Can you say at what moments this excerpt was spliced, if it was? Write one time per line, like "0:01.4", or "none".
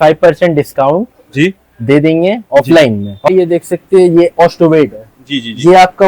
0:03.3

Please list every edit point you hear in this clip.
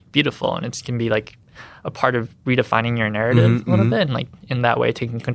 none

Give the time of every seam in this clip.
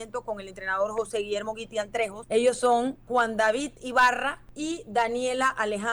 0:02.2
0:03.0
0:04.5

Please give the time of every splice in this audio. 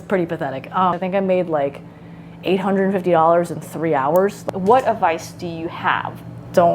0:01.0
0:04.4

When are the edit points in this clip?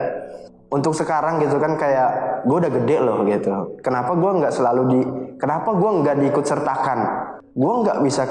0:07.4

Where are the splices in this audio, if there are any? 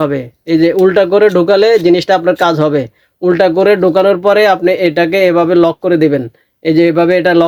none

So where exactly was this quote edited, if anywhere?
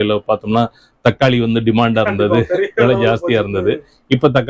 none

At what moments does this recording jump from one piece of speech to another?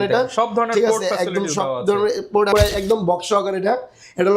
0:02.5

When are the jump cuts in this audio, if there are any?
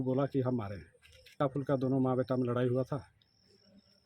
0:01.4

